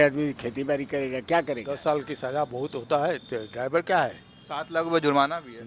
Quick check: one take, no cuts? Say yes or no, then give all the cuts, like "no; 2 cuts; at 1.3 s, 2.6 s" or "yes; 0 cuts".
no; 1 cut; at 1.8 s